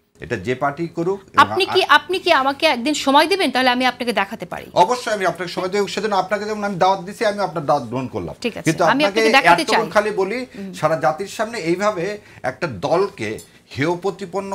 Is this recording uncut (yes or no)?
yes